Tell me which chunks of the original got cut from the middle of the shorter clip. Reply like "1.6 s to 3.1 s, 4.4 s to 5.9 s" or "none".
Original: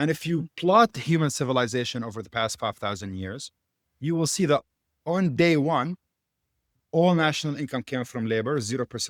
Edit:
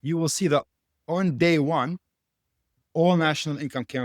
none